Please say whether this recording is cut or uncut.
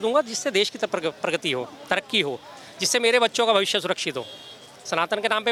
uncut